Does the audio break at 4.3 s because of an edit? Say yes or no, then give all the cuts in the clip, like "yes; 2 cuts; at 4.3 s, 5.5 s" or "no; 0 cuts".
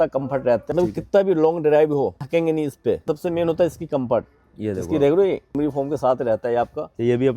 no; 4 cuts; at 0.7 s, 2.2 s, 3.0 s, 5.6 s